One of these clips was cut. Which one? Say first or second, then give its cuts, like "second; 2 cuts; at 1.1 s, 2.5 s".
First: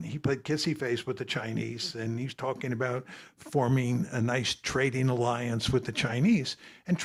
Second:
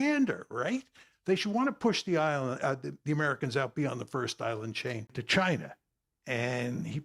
second; 1 cut; at 5.2 s